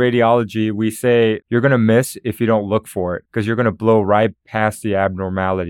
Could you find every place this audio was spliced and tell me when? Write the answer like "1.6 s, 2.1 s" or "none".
1.4 s, 3.2 s